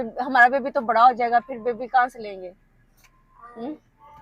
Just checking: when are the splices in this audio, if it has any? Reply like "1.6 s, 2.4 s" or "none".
none